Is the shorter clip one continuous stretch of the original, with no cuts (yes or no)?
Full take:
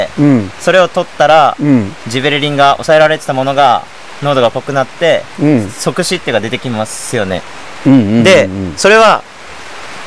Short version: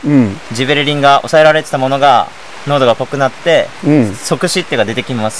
yes